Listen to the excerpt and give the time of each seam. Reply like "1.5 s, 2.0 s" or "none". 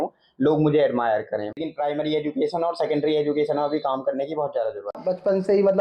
1.5 s, 5.0 s